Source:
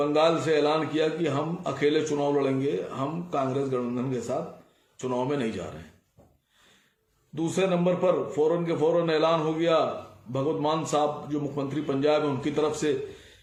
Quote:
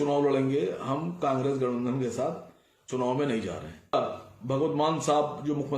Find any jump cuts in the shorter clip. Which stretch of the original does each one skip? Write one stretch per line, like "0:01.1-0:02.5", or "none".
0:06.0-0:09.8